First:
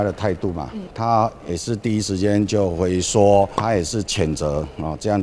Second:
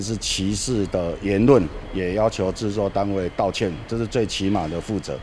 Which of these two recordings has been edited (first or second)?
first